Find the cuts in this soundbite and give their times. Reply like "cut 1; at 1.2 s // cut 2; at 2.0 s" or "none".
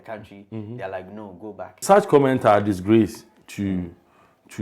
cut 1; at 1.8 s

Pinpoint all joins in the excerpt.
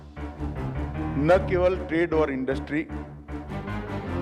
cut 1; at 2.9 s

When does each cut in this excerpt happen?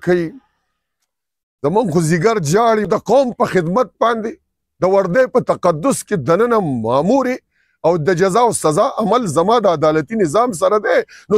cut 1; at 2.9 s

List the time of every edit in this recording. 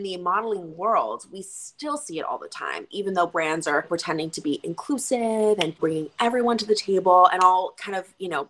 cut 1; at 3.9 s // cut 2; at 5.8 s

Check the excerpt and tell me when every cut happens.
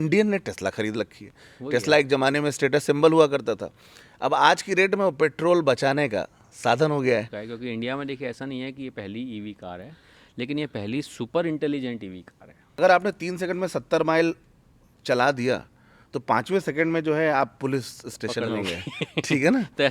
cut 1; at 7.3 s // cut 2; at 12.8 s

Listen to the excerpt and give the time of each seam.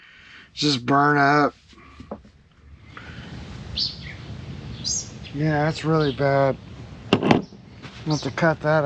cut 1; at 3.0 s

